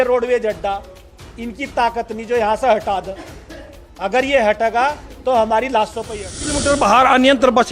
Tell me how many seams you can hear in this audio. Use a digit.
1